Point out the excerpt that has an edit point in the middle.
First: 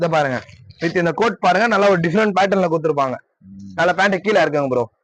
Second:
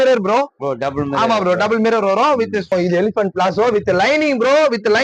second; 1 cut; at 2.7 s

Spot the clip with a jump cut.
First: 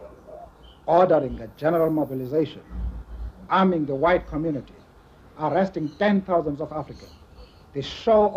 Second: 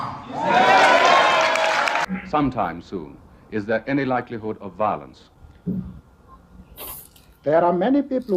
second; 1 cut; at 2.1 s

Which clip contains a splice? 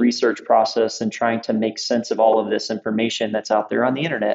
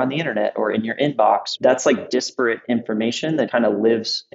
second; 2 cuts; at 1.5 s, 3.5 s

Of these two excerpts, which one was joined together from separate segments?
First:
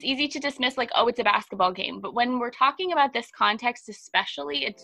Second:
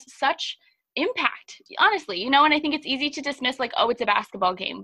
second; 1 cut; at 1.6 s

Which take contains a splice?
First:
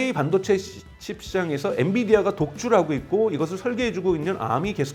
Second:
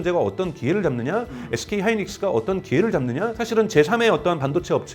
second; 1 cut; at 3.4 s

